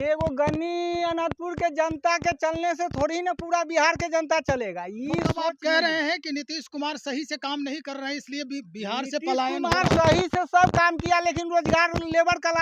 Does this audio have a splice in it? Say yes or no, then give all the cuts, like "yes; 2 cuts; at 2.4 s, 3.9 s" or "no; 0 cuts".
no; 0 cuts